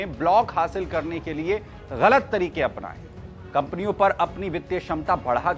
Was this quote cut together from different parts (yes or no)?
no